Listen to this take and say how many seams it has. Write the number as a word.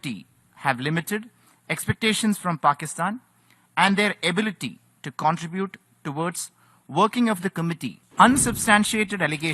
one